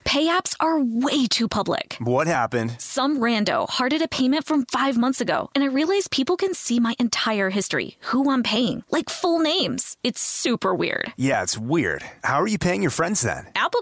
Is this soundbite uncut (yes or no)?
yes